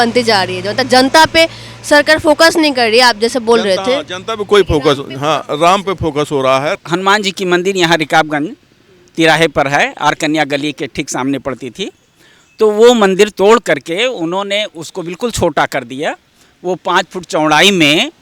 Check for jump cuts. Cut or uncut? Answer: cut